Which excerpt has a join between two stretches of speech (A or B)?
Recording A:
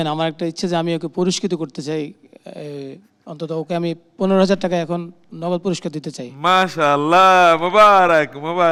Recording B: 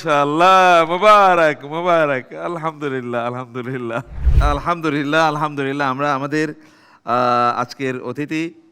B